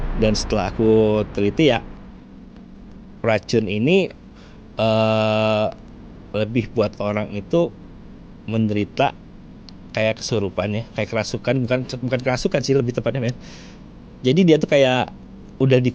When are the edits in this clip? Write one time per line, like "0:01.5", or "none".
none